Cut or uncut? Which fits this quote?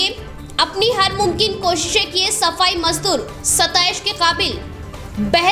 uncut